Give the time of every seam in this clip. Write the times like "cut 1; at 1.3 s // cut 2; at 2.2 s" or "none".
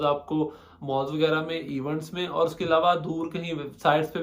none